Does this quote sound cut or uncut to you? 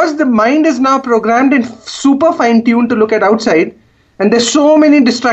uncut